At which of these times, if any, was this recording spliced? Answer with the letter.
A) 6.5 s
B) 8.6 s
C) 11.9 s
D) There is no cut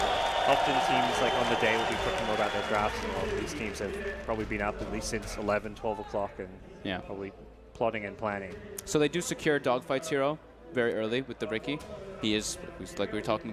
B